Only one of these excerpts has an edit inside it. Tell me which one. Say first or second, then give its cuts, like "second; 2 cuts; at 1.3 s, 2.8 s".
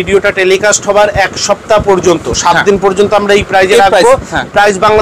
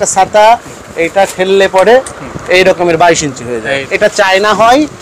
second; 1 cut; at 3.8 s